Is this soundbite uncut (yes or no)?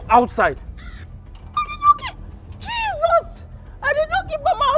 yes